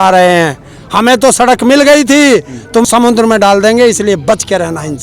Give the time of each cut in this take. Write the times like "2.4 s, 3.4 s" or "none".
2.8 s